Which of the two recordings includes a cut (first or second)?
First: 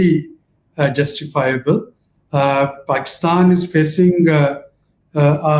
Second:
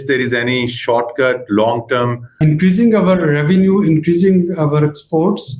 second